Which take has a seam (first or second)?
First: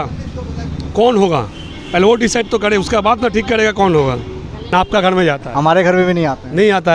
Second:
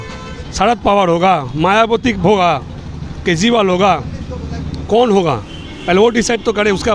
first